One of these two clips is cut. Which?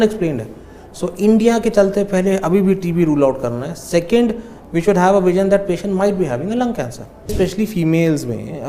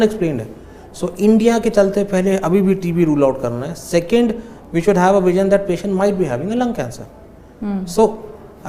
first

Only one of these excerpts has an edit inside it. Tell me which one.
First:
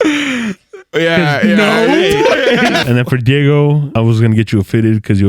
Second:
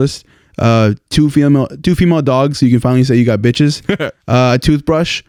first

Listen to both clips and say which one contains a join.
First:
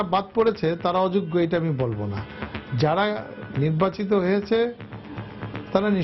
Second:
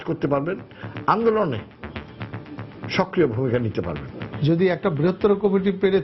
second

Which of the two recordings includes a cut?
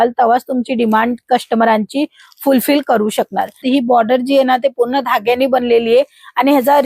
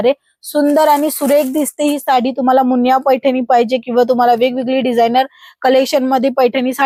first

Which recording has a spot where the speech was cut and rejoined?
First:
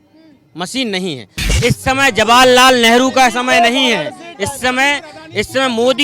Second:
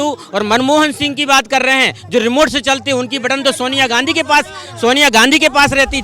first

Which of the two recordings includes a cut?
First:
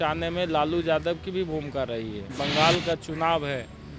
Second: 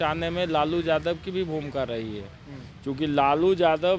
first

